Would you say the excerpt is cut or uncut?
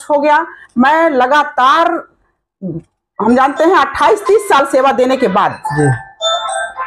uncut